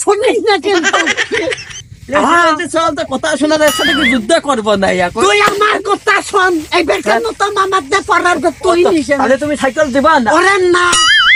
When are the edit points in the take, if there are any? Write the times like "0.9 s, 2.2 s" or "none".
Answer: none